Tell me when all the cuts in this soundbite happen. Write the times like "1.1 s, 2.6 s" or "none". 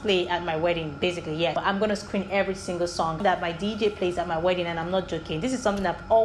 1.6 s, 3.2 s